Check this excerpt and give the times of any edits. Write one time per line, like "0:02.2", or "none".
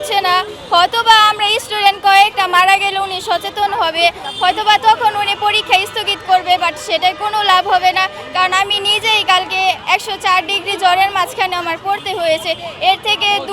none